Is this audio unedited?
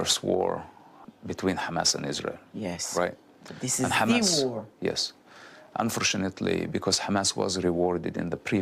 no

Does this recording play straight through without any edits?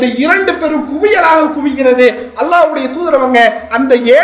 yes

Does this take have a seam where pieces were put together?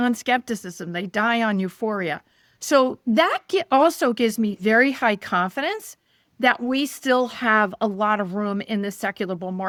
no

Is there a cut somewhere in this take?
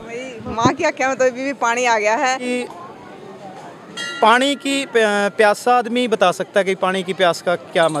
yes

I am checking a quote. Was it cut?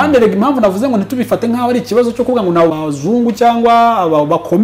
yes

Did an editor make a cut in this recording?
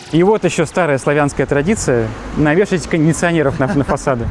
no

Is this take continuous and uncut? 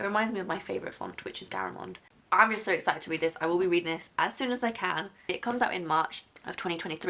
yes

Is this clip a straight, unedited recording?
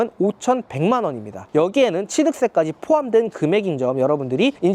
yes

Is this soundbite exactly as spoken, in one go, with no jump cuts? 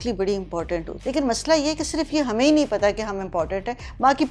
no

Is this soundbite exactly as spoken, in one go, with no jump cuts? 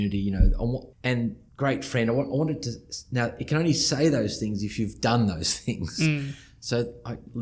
no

